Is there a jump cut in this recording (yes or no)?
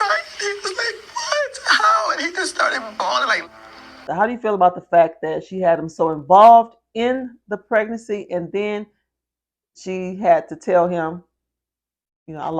yes